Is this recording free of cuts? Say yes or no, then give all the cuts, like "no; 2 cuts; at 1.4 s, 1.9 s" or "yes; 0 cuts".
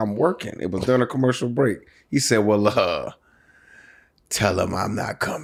yes; 0 cuts